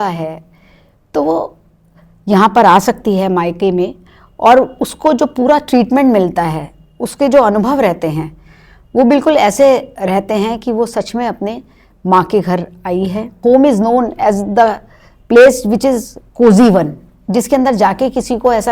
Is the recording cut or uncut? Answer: cut